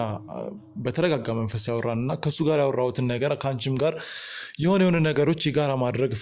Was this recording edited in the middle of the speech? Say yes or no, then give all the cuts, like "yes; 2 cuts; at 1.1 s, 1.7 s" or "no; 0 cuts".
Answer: no; 0 cuts